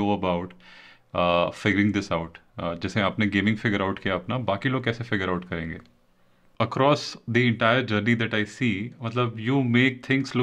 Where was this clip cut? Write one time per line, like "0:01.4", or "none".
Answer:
0:06.4